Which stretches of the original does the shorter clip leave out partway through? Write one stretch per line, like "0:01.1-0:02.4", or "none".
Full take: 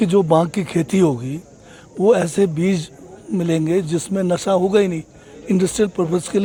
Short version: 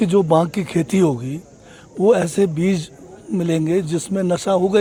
none

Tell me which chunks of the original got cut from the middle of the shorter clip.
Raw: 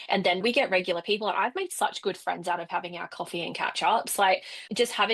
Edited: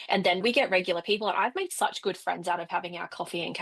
none

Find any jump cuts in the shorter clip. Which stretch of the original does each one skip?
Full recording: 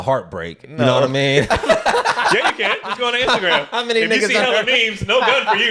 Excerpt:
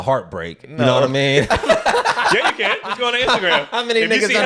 none

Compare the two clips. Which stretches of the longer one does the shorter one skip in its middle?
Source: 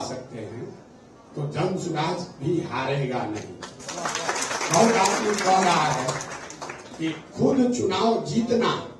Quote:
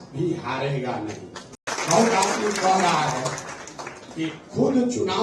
0:03.9-0:04.4

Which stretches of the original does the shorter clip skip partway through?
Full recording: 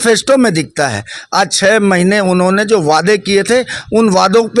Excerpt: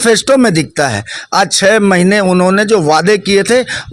none

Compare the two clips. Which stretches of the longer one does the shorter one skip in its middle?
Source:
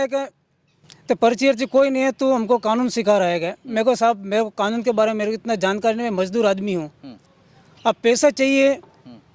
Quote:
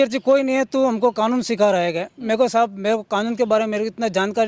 none

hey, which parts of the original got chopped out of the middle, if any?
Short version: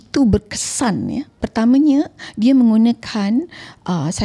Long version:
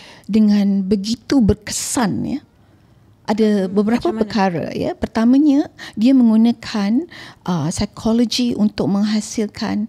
0:02.6-0:05.0

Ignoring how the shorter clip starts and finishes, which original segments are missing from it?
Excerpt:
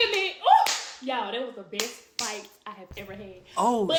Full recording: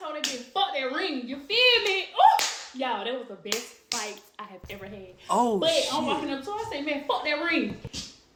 none

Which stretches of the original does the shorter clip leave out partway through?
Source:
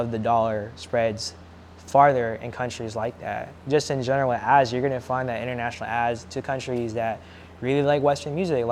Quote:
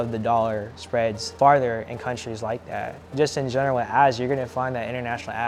0:01.2-0:01.8

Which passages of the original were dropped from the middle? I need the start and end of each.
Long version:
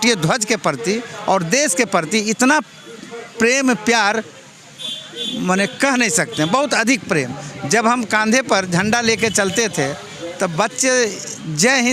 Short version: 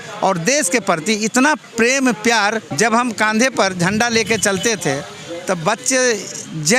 0:02.7-0:03.3
0:04.3-0:07.6

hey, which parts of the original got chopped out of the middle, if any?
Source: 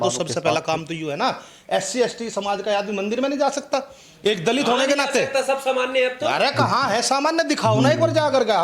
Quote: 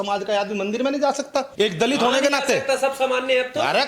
0:03.9-0:04.2

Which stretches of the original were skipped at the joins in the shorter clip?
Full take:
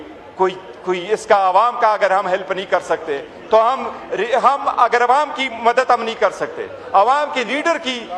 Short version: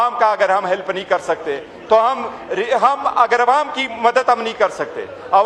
none

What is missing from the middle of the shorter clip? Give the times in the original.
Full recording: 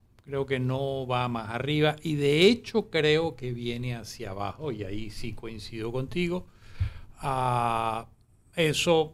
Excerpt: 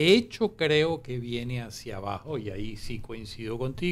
none

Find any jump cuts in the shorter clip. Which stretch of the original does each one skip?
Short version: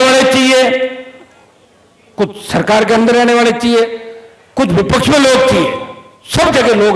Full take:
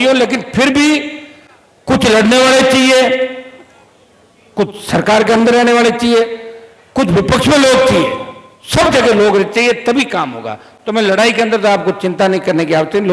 none

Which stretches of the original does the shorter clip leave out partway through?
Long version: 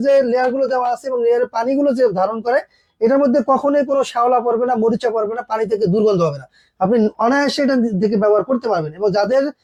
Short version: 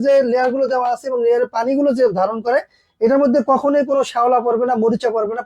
none

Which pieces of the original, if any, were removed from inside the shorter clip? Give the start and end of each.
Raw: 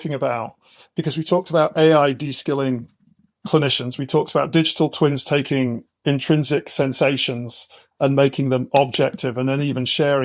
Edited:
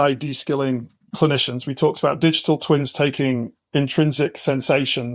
0:03.0-0:03.3

